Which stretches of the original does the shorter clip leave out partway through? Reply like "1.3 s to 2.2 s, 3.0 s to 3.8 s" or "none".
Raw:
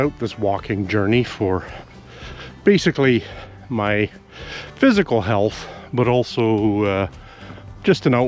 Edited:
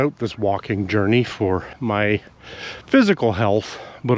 1.7 s to 3.6 s